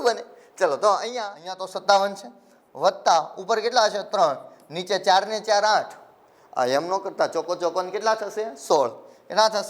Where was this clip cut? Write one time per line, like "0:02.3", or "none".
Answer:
0:01.6